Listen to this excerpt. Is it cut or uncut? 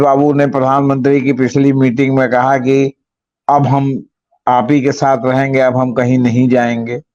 uncut